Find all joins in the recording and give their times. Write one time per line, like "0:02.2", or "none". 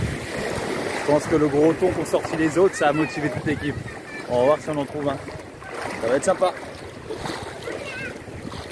none